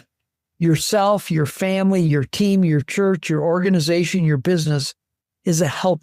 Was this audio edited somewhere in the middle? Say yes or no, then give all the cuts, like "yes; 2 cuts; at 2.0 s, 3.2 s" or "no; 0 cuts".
no; 0 cuts